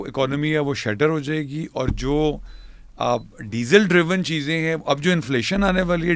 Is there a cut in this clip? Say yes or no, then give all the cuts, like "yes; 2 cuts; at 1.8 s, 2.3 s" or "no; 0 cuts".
no; 0 cuts